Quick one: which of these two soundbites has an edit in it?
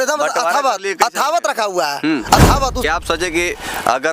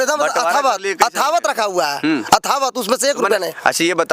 first; 1 cut; at 2.9 s

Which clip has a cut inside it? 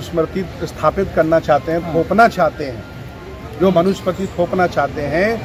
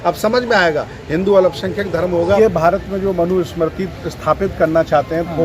second; 1 cut; at 2.4 s

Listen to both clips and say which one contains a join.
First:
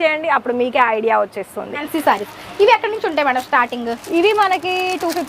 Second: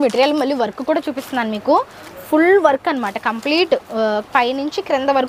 first; 1 cut; at 1.8 s

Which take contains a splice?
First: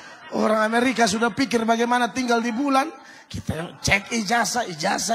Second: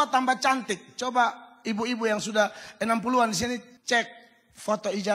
second; 1 cut; at 3.7 s

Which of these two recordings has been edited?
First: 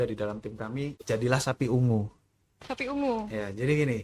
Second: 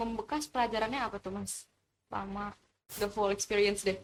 first; 1 cut; at 1.0 s

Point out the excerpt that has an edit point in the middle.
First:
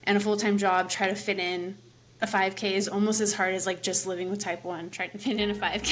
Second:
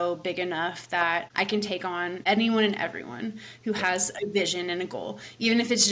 second; 1 cut; at 1.6 s

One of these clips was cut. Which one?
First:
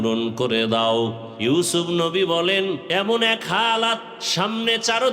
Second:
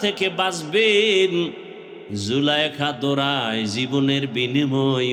first; 3 cuts; at 1.3 s, 2.8 s, 4.2 s

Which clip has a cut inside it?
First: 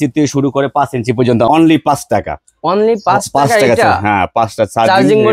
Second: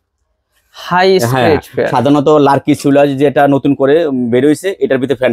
first; 1 cut; at 1.5 s

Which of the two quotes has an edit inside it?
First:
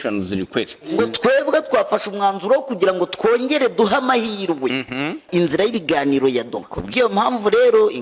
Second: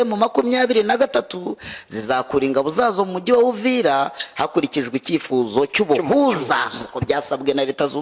first; 3 cuts; at 0.9 s, 5.3 s, 6.7 s

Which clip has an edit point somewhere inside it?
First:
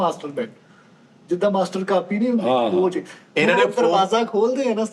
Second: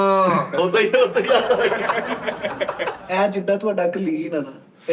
second; 1 cut; at 2.9 s

